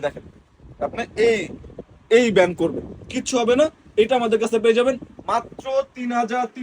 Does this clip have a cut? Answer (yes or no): no